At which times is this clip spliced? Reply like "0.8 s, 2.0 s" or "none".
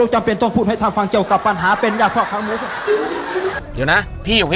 3.6 s